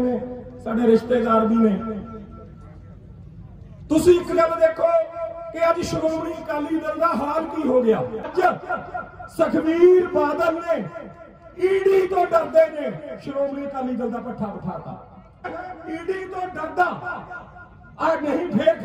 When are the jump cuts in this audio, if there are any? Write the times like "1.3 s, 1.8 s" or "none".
8.3 s, 15.5 s